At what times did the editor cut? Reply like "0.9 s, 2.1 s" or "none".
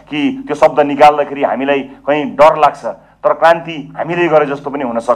none